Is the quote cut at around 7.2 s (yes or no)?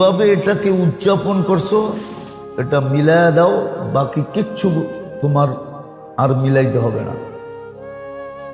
yes